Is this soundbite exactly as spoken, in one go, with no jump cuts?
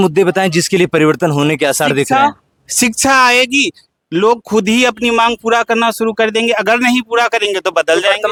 yes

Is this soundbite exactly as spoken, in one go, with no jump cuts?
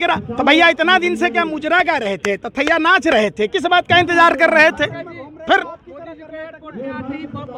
yes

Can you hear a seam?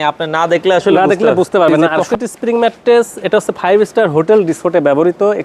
yes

